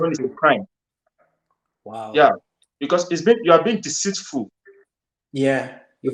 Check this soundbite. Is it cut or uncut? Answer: uncut